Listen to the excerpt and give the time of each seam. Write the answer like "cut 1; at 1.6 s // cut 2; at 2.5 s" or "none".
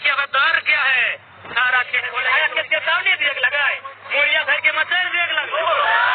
cut 1; at 2.2 s